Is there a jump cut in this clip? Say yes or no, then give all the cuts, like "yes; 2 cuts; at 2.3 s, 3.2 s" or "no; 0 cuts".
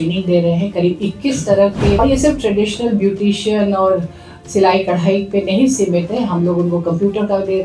yes; 1 cut; at 2.0 s